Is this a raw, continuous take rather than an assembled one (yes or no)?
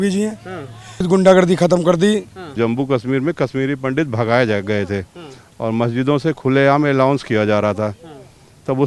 no